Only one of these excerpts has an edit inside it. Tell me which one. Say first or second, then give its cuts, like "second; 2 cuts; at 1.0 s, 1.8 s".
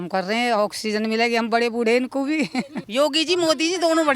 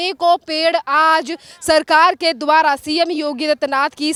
first; 1 cut; at 2.8 s